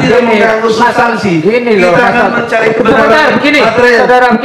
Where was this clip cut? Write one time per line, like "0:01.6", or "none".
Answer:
none